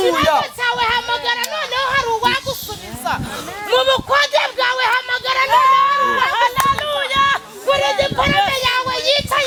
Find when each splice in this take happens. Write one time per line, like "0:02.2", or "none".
none